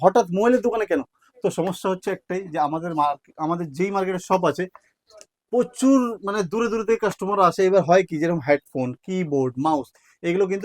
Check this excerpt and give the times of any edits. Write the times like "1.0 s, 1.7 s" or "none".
none